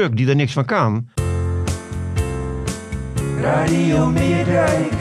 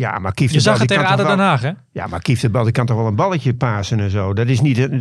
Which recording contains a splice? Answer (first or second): first